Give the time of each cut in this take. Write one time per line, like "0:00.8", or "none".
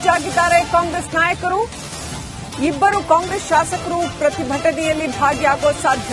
none